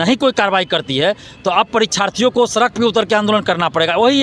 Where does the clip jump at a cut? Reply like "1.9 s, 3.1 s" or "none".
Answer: none